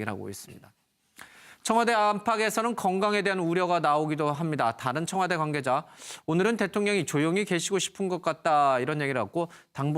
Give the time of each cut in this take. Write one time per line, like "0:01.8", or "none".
0:02.2